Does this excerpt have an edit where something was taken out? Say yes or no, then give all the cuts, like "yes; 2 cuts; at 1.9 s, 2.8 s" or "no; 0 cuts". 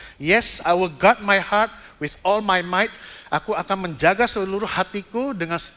no; 0 cuts